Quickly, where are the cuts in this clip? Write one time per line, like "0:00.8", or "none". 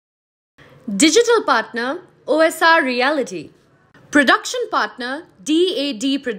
none